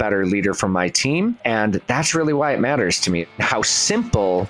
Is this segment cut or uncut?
cut